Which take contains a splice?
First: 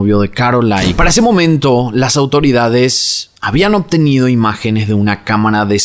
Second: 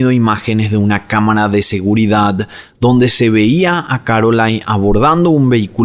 first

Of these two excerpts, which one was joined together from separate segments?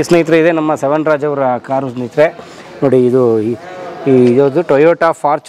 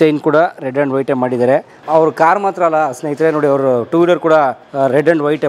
second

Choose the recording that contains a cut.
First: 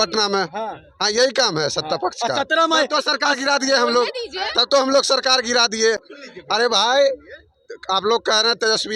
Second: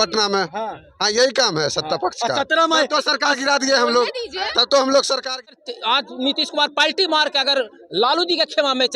second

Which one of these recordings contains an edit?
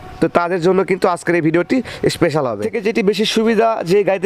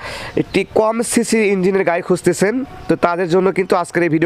first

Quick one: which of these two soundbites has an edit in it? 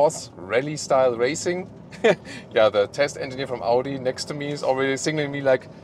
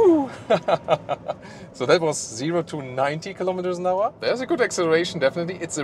second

